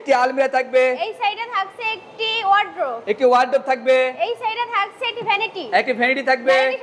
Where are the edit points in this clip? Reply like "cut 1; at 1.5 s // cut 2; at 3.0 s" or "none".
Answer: none